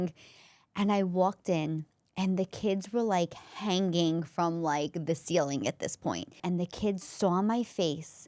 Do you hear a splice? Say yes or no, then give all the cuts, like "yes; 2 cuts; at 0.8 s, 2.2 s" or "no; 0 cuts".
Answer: yes; 1 cut; at 6.4 s